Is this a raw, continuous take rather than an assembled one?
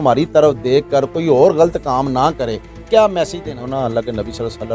no; 1 cut; at 3.4 s

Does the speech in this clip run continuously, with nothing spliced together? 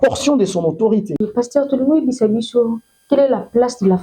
no; 1 cut; at 1.1 s

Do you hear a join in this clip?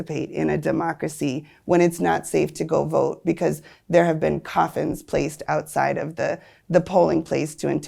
no; 0 cuts

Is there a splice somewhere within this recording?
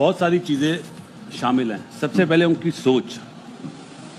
no; 0 cuts

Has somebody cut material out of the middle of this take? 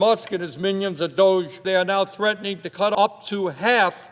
yes; 2 cuts; at 1.6 s, 3.0 s

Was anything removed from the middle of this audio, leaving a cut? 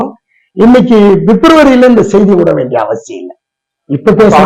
no; 0 cuts

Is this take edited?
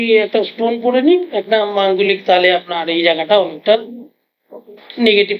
no; 0 cuts

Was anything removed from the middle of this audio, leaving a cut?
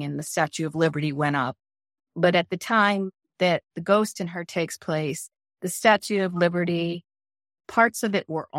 no; 0 cuts

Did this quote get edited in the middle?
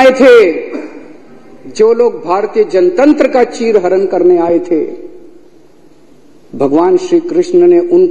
no; 0 cuts

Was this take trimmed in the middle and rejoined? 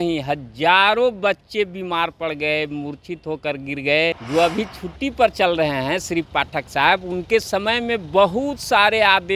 yes; 1 cut; at 4.2 s

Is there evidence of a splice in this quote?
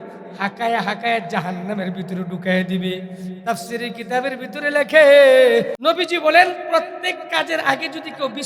yes; 1 cut; at 5.7 s

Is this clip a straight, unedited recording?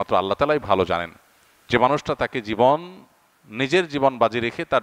yes; 0 cuts

